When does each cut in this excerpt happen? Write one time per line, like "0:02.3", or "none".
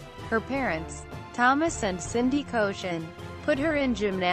0:02.5